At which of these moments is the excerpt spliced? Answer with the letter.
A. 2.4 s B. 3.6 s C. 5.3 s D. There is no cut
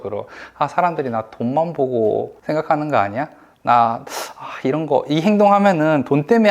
A